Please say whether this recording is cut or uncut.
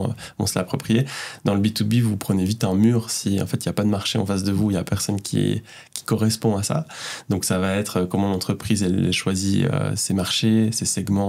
uncut